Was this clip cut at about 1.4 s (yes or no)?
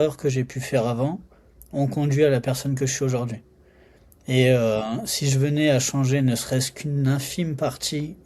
no